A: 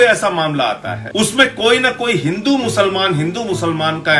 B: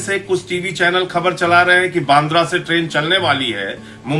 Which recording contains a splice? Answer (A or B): A